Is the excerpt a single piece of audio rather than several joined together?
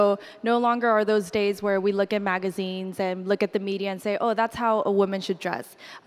yes; 0 cuts

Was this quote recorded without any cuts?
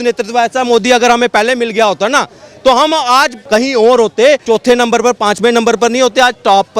no; 2 cuts; at 3.4 s, 4.4 s

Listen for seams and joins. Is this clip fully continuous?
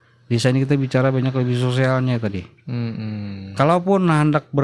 yes; 0 cuts

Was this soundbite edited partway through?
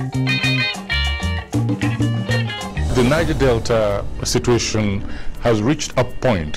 yes; 1 cut; at 2.9 s

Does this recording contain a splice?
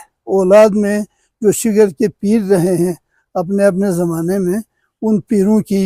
no; 0 cuts

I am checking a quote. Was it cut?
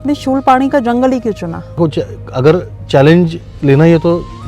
yes; 1 cut; at 1.8 s

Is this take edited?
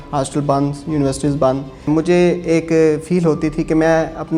yes; 1 cut; at 1.8 s

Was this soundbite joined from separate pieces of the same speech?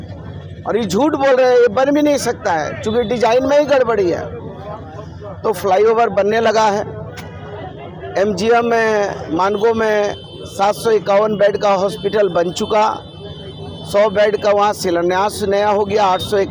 no; 0 cuts

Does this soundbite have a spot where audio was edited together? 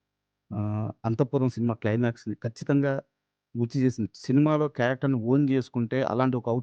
yes; 1 cut; at 4.1 s

